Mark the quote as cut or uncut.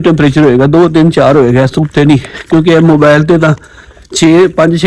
uncut